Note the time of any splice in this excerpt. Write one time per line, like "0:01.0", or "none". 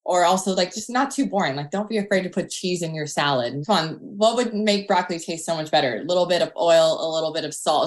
0:03.6